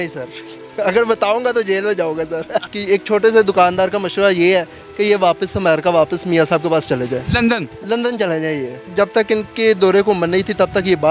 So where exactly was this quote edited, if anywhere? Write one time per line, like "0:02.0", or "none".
0:02.7
0:08.9